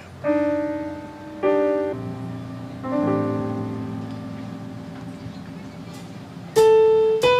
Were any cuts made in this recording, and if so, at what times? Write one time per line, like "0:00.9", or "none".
0:01.9